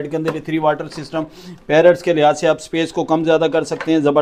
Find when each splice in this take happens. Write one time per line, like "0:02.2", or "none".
none